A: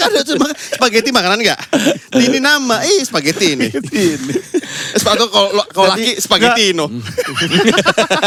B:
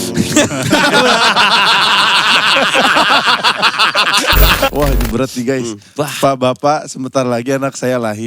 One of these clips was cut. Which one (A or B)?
B